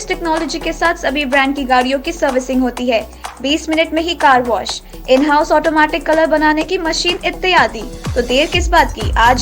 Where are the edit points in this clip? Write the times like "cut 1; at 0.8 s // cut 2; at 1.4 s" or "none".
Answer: none